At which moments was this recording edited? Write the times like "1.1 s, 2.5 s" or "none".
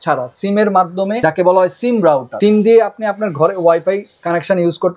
1.2 s, 2.3 s